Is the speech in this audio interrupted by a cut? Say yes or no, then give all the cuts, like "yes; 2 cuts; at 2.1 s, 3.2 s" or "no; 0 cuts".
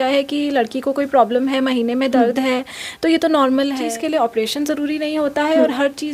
yes; 1 cut; at 3.9 s